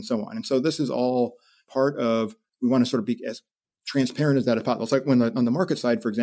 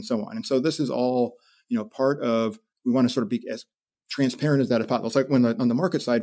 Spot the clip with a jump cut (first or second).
first